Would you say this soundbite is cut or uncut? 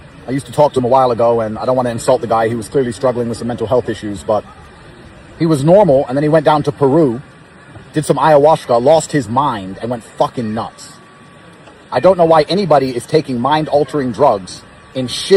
uncut